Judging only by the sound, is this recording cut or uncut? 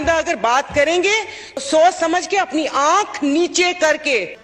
cut